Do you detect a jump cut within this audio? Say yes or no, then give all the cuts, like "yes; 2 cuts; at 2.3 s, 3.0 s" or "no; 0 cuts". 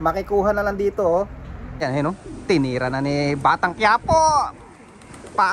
yes; 1 cut; at 1.8 s